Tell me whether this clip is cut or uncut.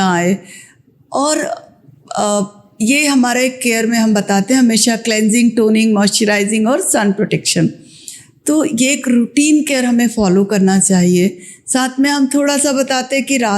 uncut